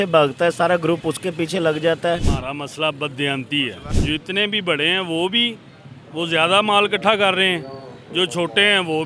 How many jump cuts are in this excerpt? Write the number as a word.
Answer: two